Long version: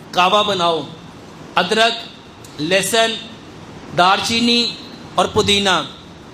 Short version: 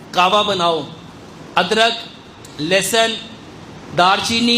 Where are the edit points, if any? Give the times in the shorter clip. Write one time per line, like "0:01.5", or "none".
none